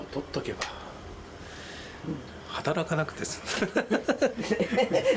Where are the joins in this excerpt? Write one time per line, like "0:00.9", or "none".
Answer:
none